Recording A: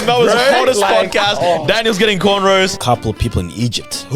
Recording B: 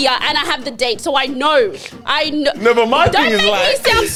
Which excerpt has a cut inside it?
A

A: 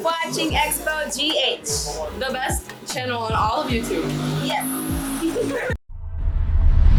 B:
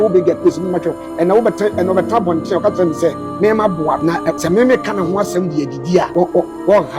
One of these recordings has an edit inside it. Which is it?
B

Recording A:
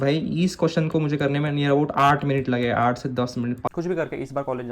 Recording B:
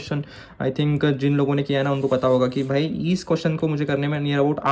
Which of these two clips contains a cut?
A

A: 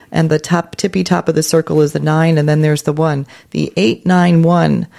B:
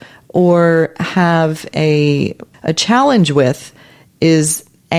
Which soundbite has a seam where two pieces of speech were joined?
B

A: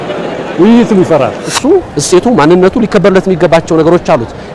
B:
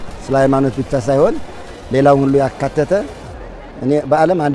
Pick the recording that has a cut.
A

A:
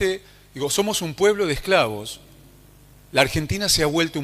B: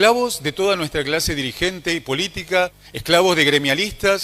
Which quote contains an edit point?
B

